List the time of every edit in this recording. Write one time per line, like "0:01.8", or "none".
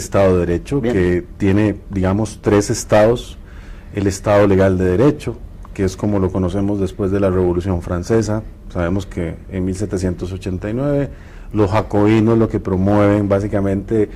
0:02.7